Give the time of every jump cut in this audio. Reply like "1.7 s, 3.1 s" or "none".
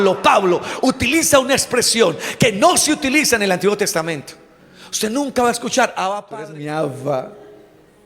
6.2 s